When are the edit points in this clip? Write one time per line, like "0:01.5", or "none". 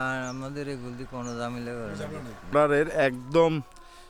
0:02.5

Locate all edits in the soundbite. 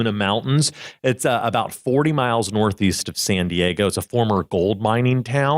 none

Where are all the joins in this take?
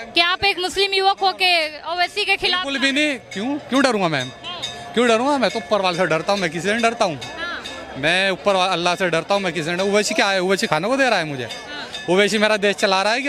none

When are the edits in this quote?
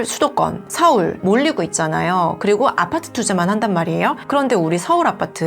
0:01.2

